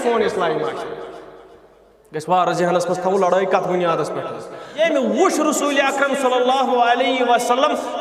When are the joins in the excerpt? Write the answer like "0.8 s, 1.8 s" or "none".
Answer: 4.6 s